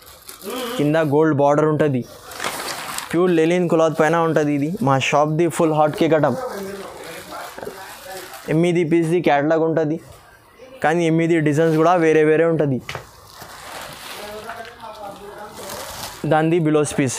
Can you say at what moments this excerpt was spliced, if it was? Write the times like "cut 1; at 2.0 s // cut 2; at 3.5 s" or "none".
none